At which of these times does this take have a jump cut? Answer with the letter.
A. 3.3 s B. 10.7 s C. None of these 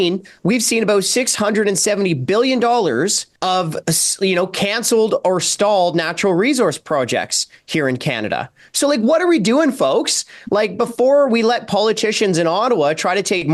A